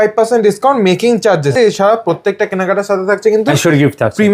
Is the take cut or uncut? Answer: cut